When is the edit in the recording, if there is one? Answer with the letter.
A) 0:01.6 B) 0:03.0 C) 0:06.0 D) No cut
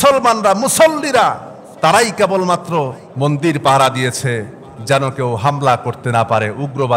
B